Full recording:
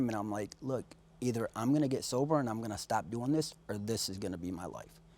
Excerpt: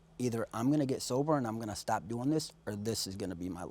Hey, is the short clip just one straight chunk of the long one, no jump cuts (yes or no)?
yes